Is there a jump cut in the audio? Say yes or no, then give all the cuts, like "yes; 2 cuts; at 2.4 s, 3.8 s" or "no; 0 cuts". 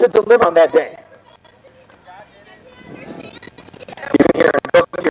no; 0 cuts